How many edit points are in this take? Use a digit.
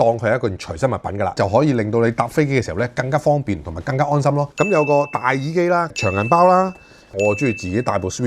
3